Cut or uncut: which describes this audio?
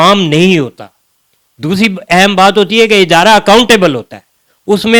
uncut